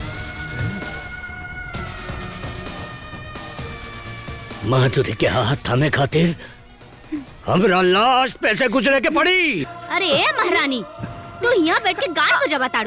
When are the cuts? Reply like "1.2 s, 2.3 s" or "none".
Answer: 9.7 s